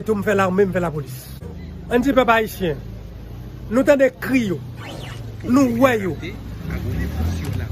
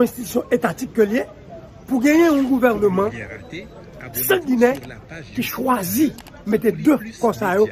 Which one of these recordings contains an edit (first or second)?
first